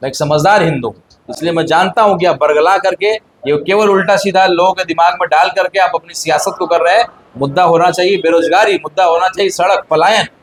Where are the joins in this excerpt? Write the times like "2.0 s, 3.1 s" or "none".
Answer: none